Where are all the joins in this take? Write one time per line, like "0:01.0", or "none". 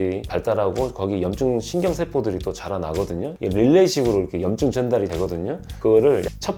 none